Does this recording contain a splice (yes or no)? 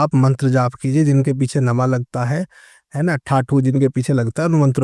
no